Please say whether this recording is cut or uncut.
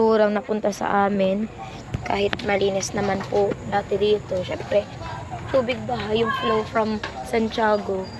uncut